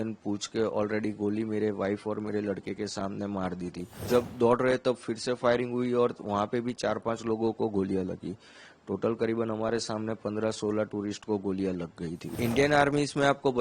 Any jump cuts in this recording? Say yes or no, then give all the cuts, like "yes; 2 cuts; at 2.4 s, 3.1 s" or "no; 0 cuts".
yes; 2 cuts; at 4.0 s, 12.3 s